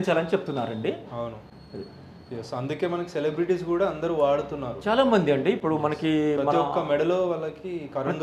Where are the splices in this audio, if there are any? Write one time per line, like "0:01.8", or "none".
none